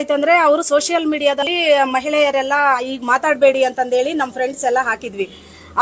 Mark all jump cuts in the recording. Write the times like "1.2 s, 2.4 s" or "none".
1.5 s